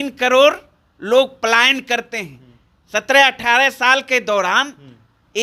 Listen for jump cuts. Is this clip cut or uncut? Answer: uncut